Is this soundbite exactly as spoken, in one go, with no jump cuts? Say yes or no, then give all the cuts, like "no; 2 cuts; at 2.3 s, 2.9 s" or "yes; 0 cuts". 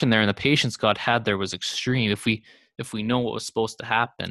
yes; 0 cuts